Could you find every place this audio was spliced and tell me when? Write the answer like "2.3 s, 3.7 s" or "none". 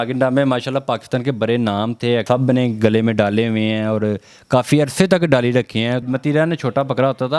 2.2 s, 6.1 s